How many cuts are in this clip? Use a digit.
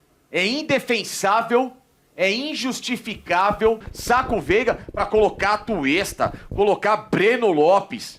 1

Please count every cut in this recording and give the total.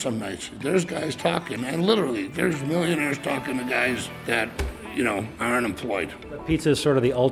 0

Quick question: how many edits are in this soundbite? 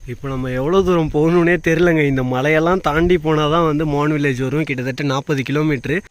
0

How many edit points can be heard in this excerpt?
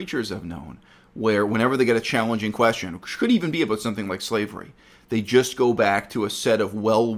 0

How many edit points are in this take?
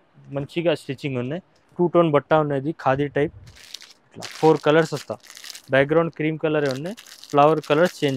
1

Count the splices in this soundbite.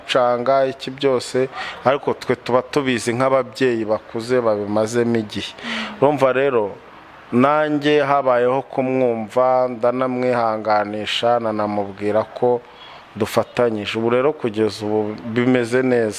0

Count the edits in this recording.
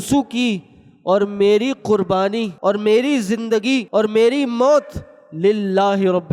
2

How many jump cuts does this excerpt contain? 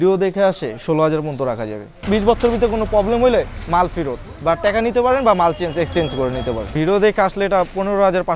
2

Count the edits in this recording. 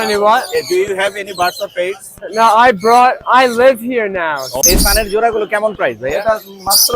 1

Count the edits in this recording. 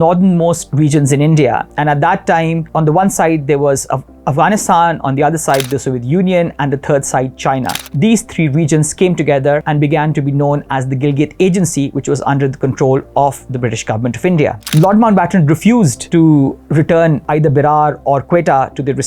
6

